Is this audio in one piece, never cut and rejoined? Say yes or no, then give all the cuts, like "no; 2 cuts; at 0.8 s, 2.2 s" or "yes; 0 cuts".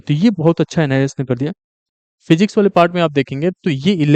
no; 1 cut; at 1.7 s